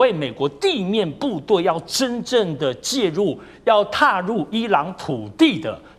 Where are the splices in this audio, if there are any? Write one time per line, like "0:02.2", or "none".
none